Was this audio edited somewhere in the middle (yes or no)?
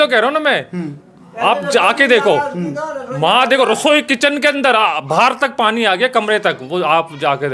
no